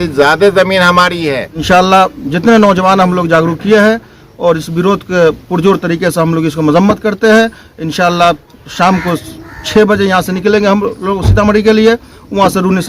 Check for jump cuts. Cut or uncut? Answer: cut